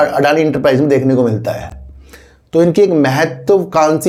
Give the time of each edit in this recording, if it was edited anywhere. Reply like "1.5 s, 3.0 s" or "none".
none

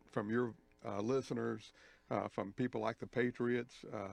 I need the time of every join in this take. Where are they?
1.2 s

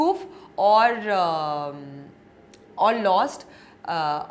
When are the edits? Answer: none

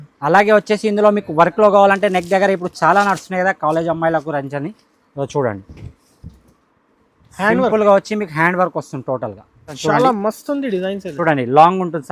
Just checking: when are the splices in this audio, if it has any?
9.7 s

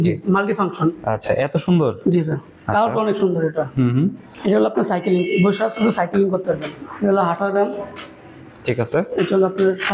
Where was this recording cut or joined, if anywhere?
4.3 s, 6.7 s

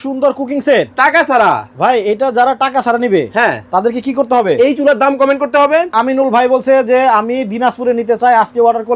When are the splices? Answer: 5.9 s

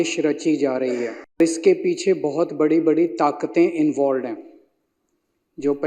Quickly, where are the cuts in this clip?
1.4 s

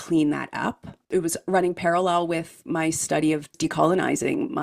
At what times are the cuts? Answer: 1.0 s, 2.7 s, 3.5 s

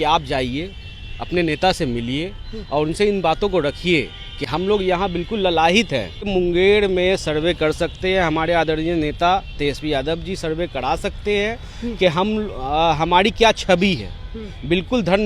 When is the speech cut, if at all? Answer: 6.3 s

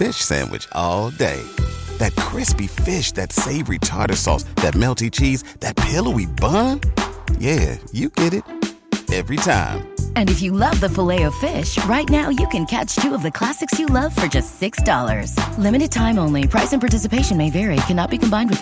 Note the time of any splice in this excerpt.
none

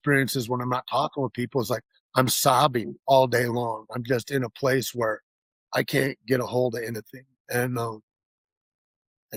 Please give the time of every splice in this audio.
none

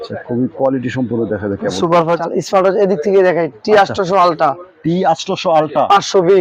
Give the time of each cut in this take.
2.2 s

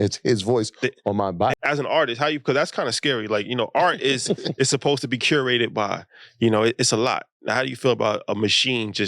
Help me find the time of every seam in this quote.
1.6 s

